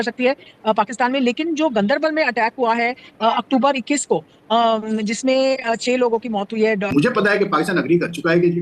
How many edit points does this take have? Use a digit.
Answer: 1